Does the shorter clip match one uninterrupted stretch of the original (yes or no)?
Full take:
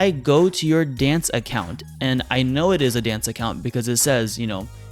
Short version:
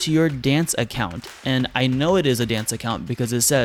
yes